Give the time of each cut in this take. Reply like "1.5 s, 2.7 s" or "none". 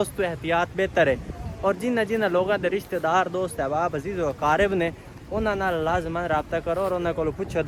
none